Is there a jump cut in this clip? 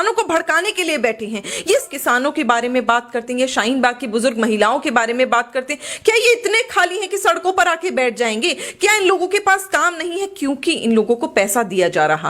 yes; 1 cut; at 1.9 s

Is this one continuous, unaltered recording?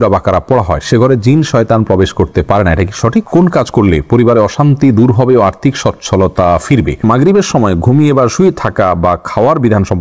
no; 2 cuts; at 3.3 s, 7.0 s

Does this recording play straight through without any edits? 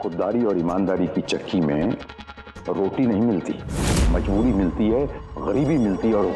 no; 1 cut; at 4.1 s

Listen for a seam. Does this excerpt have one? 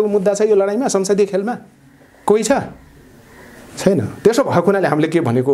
no; 0 cuts

